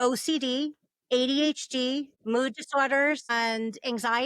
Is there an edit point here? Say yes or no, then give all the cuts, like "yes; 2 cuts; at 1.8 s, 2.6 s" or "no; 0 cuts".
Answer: yes; 2 cuts; at 2.1 s, 3.3 s